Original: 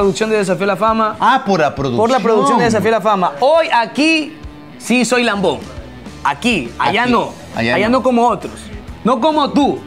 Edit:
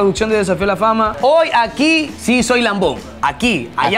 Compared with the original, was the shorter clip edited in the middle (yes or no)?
yes